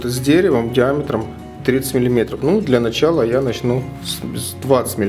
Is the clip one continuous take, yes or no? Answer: yes